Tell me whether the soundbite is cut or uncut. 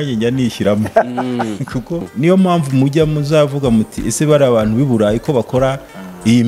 cut